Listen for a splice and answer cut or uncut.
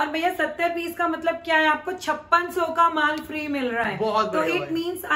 uncut